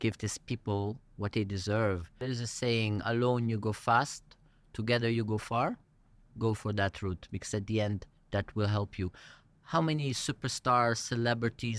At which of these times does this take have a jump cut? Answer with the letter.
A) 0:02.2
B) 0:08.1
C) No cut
A